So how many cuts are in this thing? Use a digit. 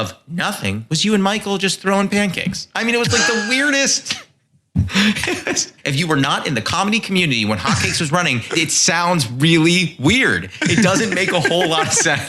2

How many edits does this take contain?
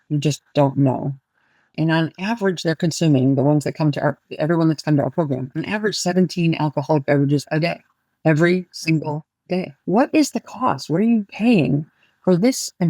2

